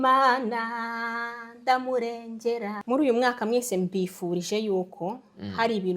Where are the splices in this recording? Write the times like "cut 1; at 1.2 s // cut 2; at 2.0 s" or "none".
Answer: cut 1; at 2.7 s